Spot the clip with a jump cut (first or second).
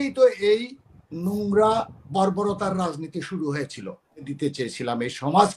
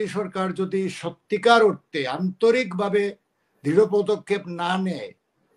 first